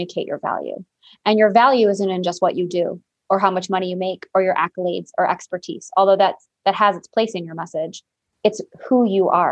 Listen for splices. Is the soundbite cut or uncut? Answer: cut